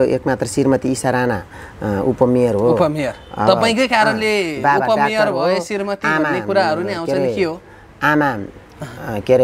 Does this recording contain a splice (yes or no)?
no